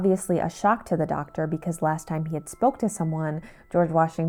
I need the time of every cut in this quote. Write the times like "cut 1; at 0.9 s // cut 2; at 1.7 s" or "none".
none

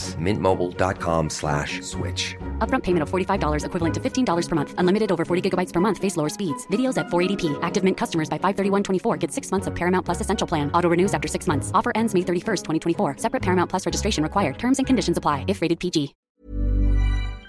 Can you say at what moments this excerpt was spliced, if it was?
cut 1; at 16.2 s

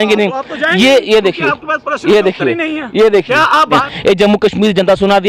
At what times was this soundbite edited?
cut 1; at 3.9 s

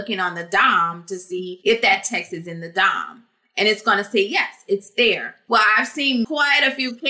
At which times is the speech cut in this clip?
cut 1; at 1.5 s // cut 2; at 5.3 s // cut 3; at 6.3 s

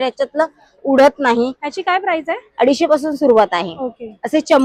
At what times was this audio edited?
none

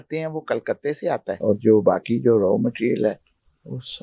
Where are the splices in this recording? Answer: cut 1; at 1.3 s

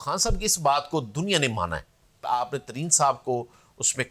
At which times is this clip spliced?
cut 1; at 2.2 s

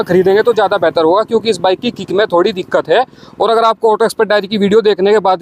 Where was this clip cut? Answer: none

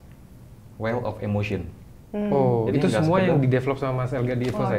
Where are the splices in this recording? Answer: none

